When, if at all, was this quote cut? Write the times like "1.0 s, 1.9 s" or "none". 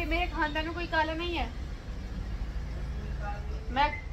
none